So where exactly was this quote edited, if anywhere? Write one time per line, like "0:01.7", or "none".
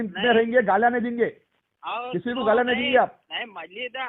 none